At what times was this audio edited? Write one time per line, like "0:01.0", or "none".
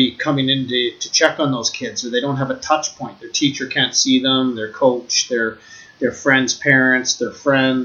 none